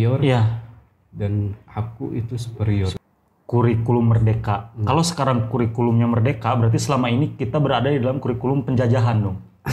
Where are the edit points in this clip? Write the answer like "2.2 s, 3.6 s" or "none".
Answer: 3.0 s

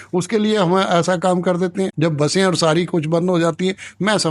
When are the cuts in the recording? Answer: none

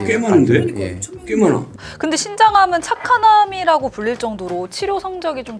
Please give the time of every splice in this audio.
1.7 s

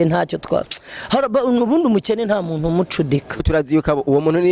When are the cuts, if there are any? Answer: 3.4 s

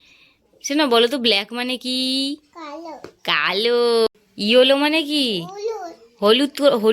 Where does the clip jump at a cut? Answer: 4.2 s

